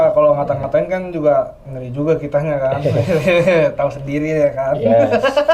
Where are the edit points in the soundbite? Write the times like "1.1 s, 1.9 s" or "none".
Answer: none